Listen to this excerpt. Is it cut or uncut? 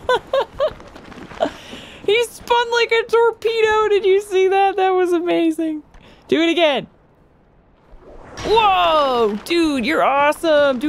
uncut